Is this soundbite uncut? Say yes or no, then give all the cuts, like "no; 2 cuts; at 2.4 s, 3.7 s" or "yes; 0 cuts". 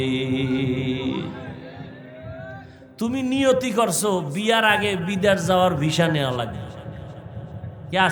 yes; 0 cuts